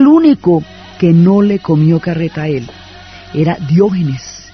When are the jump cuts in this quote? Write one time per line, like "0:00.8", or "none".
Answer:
0:01.6